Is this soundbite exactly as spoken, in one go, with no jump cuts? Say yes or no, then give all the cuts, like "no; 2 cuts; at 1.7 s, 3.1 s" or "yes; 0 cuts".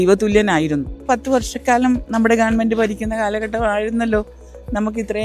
no; 1 cut; at 1.0 s